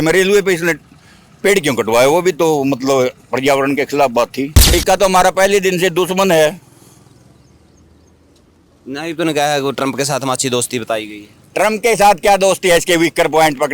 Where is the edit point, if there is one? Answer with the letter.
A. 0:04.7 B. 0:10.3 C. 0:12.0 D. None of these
A